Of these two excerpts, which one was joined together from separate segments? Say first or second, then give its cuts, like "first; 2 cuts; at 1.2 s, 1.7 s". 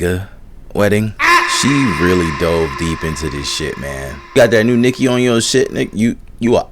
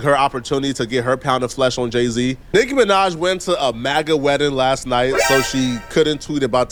first; 1 cut; at 4.3 s